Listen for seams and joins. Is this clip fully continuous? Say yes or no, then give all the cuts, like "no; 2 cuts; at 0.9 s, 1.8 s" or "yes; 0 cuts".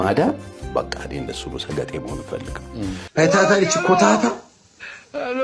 no; 1 cut; at 3.0 s